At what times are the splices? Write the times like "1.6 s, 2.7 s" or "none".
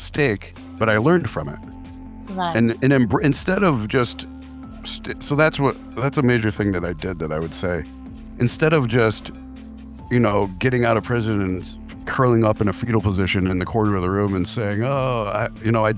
none

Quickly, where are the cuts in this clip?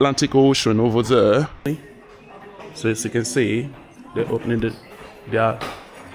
1.7 s

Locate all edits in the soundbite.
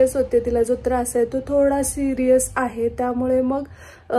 none

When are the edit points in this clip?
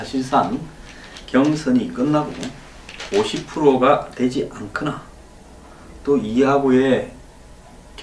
3.9 s

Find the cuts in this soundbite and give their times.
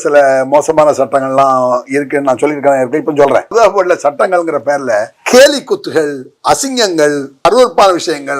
3.5 s, 5.2 s, 7.5 s

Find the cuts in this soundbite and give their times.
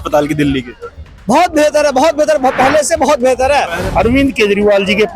3.8 s

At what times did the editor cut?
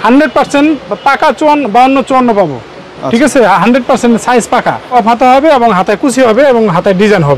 4.9 s

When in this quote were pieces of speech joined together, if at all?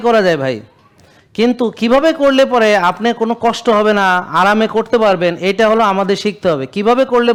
none

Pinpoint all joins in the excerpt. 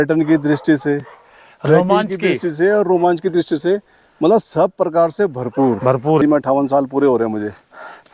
6.2 s

